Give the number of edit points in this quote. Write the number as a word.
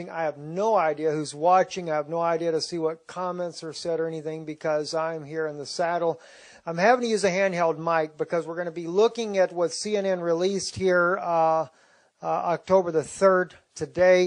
zero